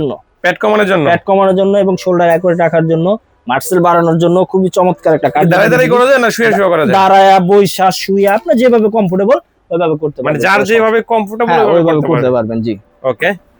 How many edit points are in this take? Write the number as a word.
zero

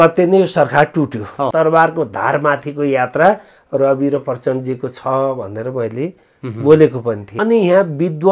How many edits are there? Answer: two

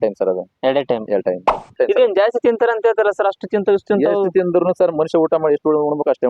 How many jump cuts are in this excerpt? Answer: one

